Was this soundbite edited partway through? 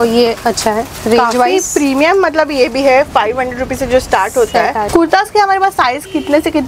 yes; 1 cut; at 4.9 s

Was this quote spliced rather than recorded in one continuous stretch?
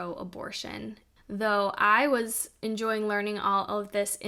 yes; 1 cut; at 1.0 s

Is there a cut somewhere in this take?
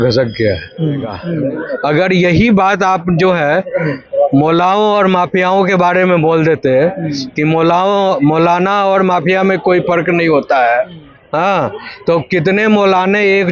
no; 0 cuts

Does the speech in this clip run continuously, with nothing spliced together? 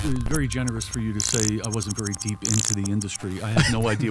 yes; 0 cuts

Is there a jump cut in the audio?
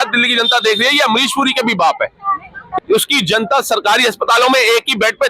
yes; 1 cut; at 2.7 s

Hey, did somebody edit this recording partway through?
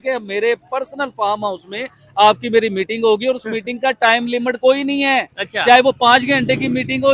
no; 0 cuts

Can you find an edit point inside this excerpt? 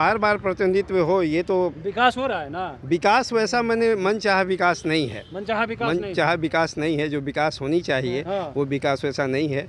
no; 0 cuts

